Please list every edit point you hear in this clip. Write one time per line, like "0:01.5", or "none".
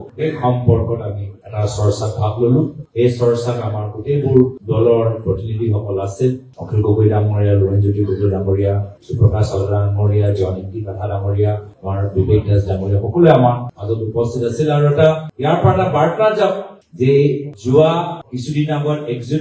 none